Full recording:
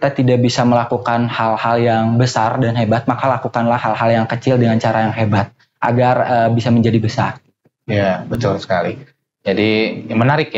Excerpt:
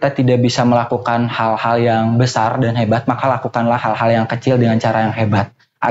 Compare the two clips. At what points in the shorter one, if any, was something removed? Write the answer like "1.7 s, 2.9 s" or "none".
none